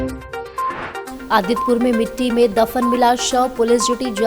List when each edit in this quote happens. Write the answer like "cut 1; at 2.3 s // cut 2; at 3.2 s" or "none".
cut 1; at 1.0 s